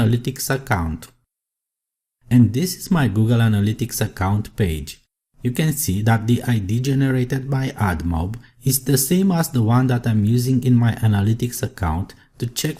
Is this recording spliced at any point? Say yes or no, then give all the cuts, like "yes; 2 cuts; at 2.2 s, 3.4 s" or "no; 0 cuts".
yes; 1 cut; at 2.3 s